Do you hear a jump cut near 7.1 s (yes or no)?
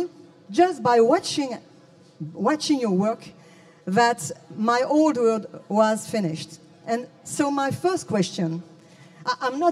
no